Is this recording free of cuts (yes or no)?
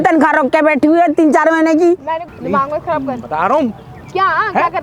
no